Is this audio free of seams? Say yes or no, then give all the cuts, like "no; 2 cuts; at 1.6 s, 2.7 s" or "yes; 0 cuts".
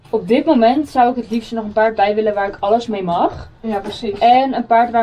yes; 0 cuts